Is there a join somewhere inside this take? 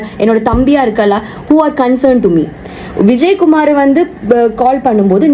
no; 0 cuts

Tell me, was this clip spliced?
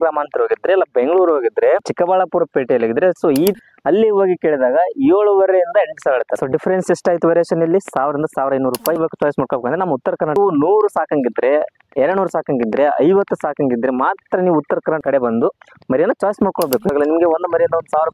yes; 4 cuts; at 3.6 s, 9.0 s, 10.4 s, 16.9 s

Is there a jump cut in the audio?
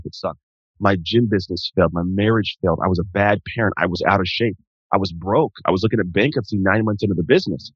no; 0 cuts

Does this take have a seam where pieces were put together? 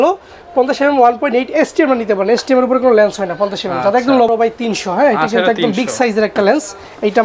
yes; 1 cut; at 4.3 s

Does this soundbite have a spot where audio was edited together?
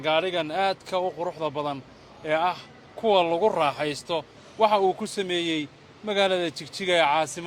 yes; 1 cut; at 4.4 s

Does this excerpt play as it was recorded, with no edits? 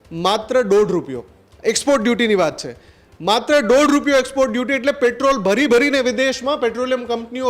yes; 0 cuts

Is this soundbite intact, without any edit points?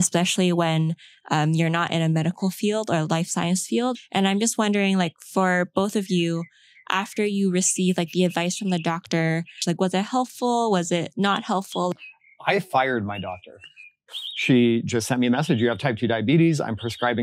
no; 4 cuts; at 4.0 s, 9.6 s, 11.9 s, 14.0 s

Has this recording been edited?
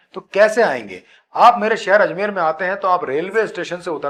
no; 0 cuts

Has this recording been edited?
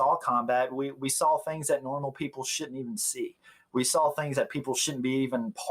yes; 1 cut; at 4.8 s

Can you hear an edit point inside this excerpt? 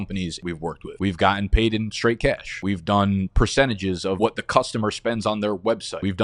no; 0 cuts

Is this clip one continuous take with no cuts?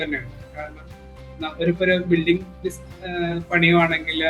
yes; 0 cuts

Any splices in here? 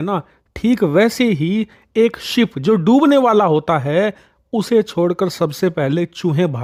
no; 0 cuts

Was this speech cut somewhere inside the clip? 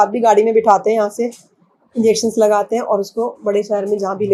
no; 0 cuts

